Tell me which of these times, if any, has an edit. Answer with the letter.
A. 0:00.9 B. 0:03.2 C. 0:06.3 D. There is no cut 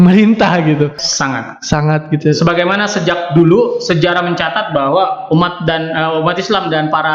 A